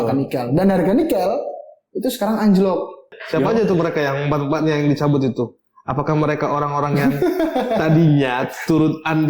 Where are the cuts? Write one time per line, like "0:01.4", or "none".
0:03.1